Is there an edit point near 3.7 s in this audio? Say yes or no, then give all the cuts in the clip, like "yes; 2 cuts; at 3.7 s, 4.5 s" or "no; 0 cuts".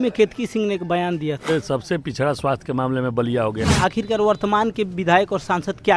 yes; 2 cuts; at 1.5 s, 3.7 s